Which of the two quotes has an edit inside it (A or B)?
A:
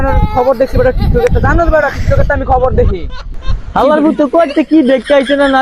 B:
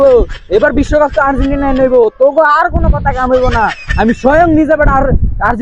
A